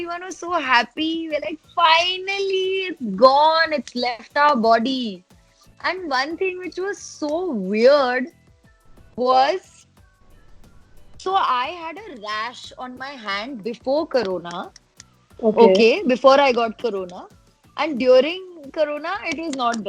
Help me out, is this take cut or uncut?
uncut